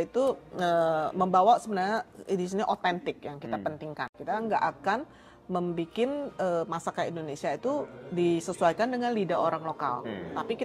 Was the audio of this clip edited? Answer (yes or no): yes